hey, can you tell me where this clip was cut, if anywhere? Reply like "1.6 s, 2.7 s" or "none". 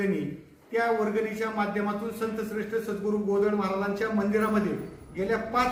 none